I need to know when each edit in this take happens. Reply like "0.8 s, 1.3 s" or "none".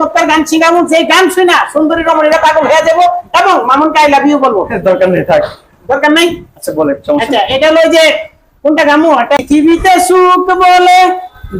9.4 s